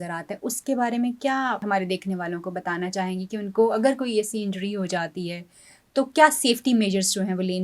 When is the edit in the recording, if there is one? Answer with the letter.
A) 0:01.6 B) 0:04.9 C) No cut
A